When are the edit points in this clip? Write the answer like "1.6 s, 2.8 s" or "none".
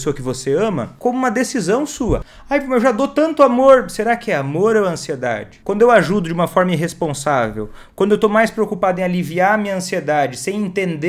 0.9 s, 2.3 s, 5.5 s